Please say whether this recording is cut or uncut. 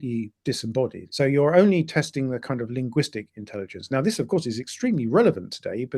cut